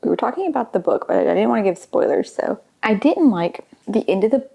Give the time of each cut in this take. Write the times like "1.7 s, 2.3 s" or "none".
none